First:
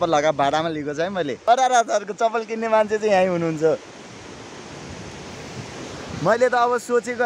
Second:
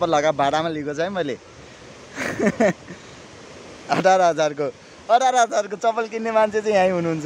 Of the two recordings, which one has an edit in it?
first; 1 cut; at 1.4 s

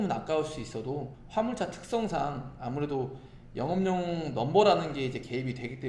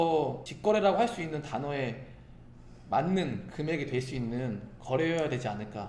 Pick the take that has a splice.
first; 1 cut; at 1.1 s

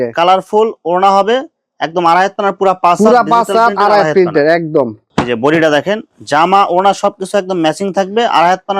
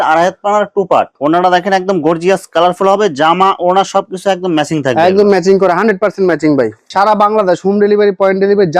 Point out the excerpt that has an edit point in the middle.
second; 2 cuts; at 1.1 s, 6.8 s

